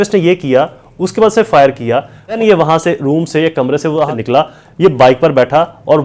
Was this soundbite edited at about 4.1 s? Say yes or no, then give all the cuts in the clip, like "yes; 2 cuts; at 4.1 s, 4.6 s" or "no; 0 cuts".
yes; 2 cuts; at 2.4 s, 4.1 s